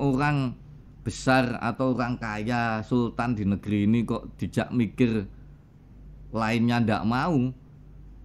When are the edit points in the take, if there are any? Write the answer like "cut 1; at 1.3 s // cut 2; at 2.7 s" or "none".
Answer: none

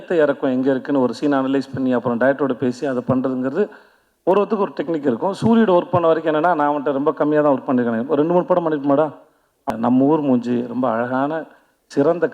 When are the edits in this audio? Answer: cut 1; at 9.7 s

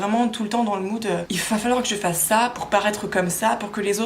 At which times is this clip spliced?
cut 1; at 1.3 s

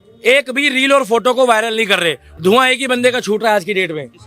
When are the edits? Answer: cut 1; at 2.2 s

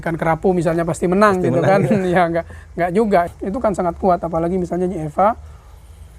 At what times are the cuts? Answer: cut 1; at 3.3 s

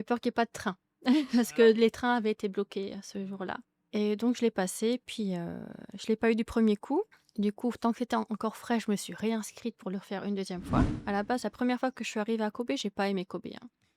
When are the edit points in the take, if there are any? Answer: cut 1; at 3.7 s // cut 2; at 7.2 s // cut 3; at 10.9 s

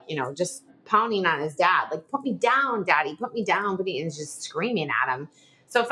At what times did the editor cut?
none

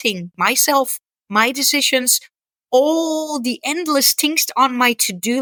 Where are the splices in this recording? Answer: none

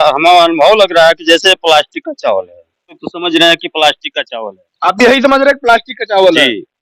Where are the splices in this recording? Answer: cut 1; at 3.0 s

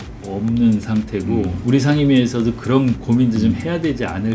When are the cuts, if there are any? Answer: cut 1; at 1.5 s

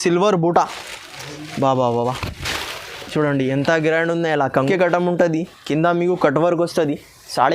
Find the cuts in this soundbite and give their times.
cut 1; at 4.5 s

